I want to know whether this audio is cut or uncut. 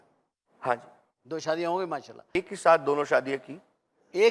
cut